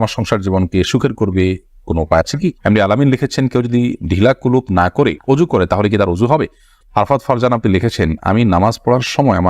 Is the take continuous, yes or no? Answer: no